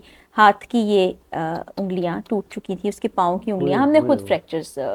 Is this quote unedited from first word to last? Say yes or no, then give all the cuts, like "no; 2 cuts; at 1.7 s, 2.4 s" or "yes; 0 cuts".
yes; 0 cuts